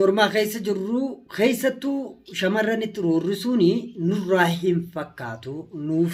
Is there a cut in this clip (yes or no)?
no